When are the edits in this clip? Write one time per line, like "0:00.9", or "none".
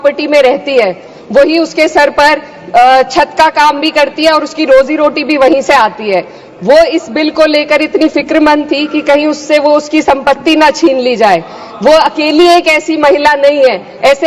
none